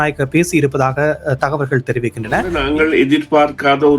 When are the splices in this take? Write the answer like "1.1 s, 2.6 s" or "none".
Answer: 2.5 s

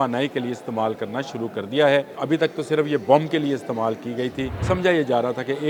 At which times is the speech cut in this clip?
2.1 s, 4.6 s

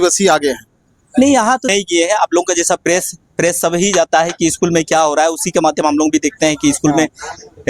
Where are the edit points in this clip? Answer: 1.7 s

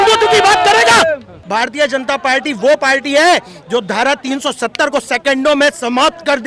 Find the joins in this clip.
1.4 s

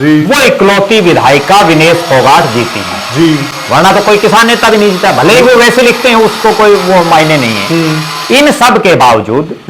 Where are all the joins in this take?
none

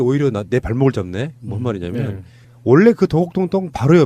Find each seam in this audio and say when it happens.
2.3 s

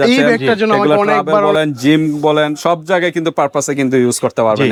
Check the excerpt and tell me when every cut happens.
none

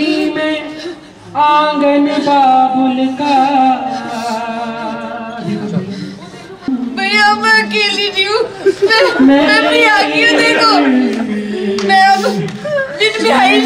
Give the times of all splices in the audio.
6.7 s

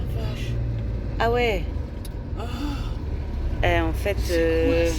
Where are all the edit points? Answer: none

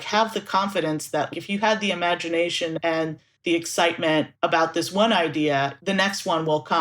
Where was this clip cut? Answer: 1.3 s, 2.9 s, 4.3 s, 5.8 s

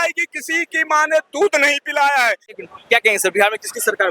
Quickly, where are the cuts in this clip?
2.6 s

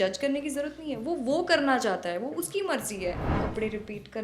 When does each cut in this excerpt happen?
3.3 s

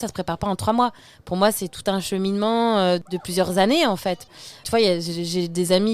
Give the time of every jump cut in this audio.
3.0 s, 4.6 s

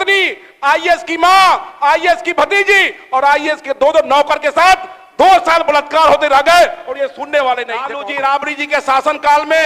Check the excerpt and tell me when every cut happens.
8.0 s

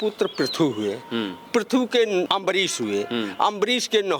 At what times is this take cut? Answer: 2.3 s

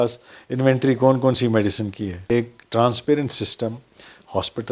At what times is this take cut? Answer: 2.3 s

